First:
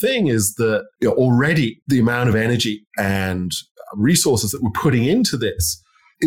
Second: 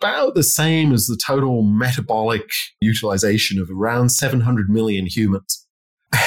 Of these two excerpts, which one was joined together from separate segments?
second; 1 cut; at 2.8 s

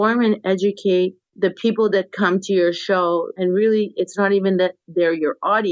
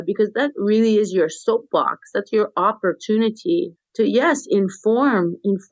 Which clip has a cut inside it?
first; 1 cut; at 3.3 s

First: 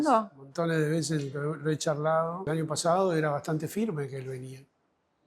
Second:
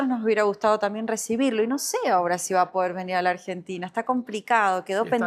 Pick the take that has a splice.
first; 1 cut; at 2.5 s

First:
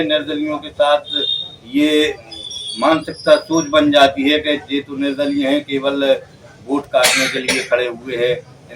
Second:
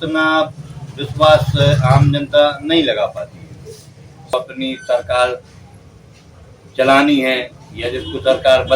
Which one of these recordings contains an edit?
second; 1 cut; at 4.3 s

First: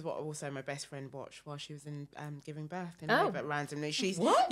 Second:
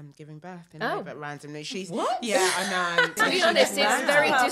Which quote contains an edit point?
second; 1 cut; at 3.2 s

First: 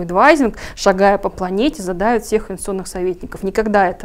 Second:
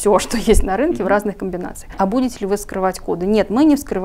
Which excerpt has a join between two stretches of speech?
second; 1 cut; at 2.0 s

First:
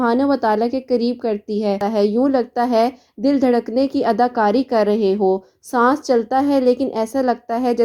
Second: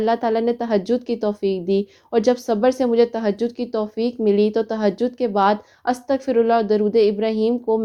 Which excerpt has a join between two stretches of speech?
first; 1 cut; at 1.8 s

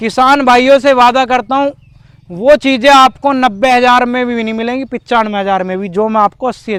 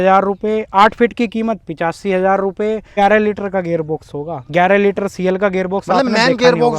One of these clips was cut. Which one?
second; 1 cut; at 2.9 s

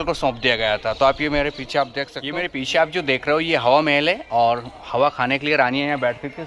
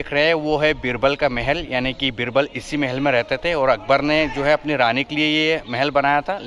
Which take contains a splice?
first; 1 cut; at 2.2 s

